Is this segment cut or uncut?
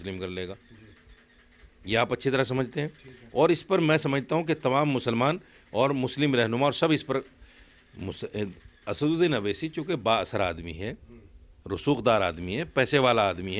uncut